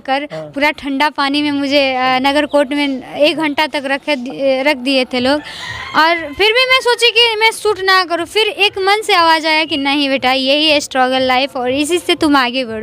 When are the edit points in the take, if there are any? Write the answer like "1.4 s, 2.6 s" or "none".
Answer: none